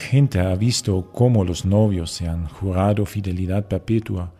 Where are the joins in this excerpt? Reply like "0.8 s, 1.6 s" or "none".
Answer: 1.6 s